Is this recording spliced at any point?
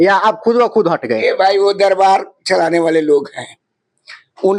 no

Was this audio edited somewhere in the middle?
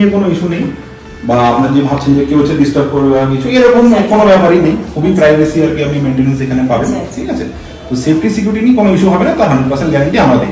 no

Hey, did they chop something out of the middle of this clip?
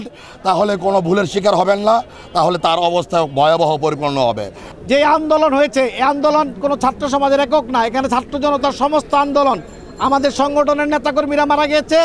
yes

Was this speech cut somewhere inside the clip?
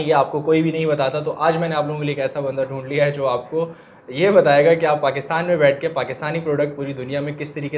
no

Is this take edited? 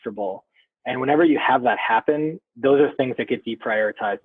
no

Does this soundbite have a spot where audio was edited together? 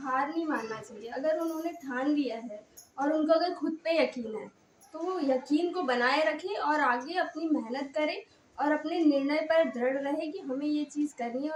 no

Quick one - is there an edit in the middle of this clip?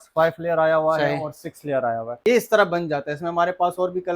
yes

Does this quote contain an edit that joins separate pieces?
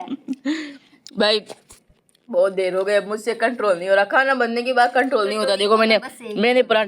no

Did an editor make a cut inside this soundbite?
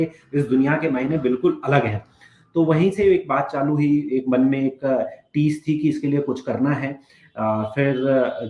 no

